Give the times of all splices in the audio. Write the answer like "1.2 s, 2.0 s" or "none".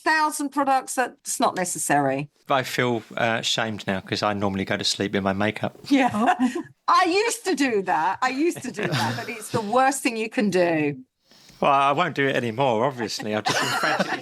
1.1 s, 2.4 s